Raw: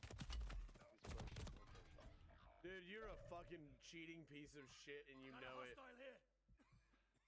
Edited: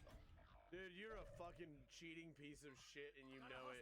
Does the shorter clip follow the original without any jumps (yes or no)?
yes